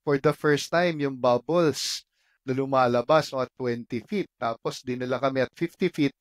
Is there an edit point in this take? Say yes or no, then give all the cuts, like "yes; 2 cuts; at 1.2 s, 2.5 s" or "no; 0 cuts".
no; 0 cuts